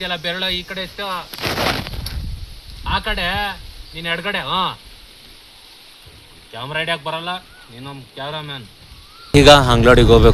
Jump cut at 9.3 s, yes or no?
yes